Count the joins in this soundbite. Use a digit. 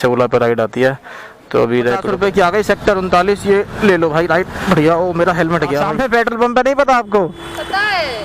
2